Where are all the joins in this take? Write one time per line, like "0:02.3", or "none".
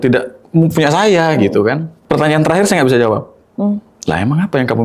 0:01.9
0:03.9